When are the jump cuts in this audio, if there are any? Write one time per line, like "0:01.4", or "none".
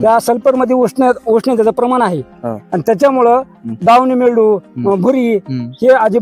none